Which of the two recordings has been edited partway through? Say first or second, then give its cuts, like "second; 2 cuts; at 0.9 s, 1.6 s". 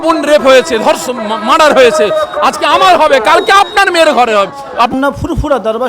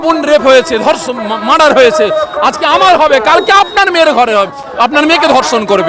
first; 1 cut; at 4.7 s